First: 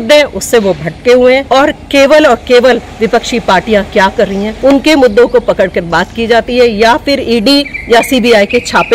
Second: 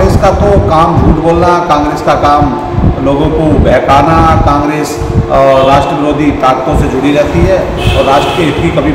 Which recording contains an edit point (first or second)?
first